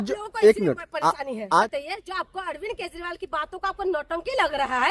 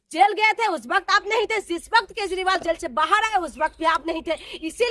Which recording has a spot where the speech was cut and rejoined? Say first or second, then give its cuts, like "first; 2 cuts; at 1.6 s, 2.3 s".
first; 1 cut; at 1.6 s